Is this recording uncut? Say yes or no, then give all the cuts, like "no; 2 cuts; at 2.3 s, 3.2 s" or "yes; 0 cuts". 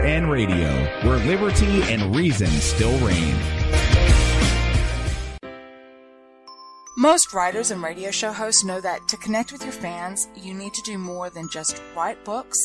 no; 1 cut; at 5.4 s